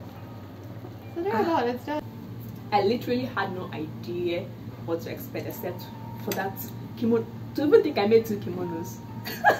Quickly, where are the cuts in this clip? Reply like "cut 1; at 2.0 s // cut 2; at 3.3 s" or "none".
cut 1; at 2.1 s